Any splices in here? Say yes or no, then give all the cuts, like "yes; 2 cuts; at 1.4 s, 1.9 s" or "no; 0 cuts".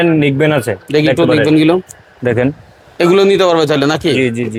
no; 0 cuts